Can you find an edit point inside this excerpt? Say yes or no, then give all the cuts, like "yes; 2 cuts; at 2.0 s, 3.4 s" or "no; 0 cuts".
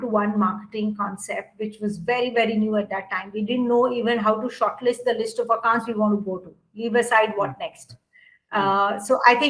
no; 0 cuts